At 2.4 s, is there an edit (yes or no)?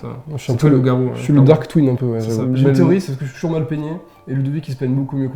yes